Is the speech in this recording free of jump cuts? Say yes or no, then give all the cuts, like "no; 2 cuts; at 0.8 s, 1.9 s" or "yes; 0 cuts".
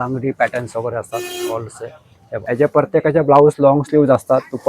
no; 1 cut; at 2.4 s